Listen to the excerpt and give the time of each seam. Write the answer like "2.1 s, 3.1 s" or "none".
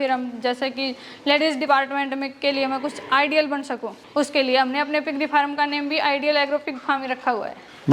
none